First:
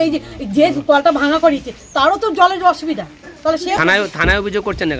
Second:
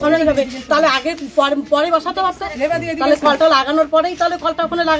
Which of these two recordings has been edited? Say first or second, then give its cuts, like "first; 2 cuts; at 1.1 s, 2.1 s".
first; 1 cut; at 3.8 s